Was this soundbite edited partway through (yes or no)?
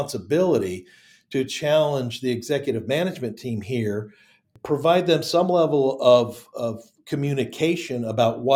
no